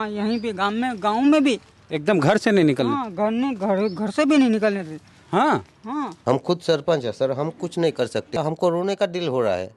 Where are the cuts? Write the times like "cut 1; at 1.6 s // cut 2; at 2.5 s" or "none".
cut 1; at 6.1 s // cut 2; at 8.4 s